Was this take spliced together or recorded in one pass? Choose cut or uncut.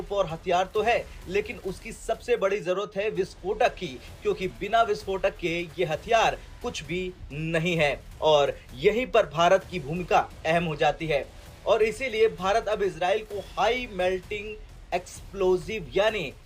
uncut